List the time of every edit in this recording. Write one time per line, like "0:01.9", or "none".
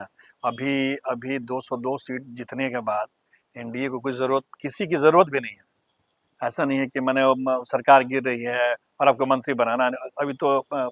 none